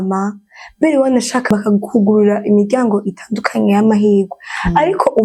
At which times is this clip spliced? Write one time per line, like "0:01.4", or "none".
0:01.5